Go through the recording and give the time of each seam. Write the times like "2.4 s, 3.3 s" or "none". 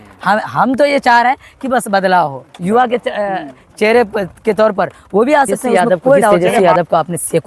6.5 s